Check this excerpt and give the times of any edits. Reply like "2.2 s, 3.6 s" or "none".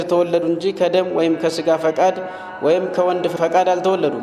3.3 s